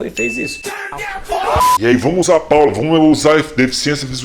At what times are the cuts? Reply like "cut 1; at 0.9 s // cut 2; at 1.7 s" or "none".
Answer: cut 1; at 1.8 s